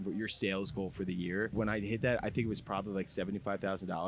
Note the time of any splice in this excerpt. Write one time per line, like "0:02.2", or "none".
0:01.5